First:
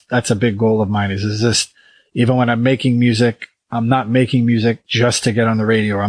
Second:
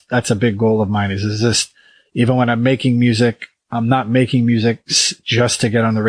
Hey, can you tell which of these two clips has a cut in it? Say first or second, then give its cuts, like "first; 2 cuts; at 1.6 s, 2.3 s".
first; 1 cut; at 4.9 s